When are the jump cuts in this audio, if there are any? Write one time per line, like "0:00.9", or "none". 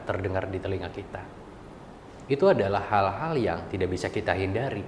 none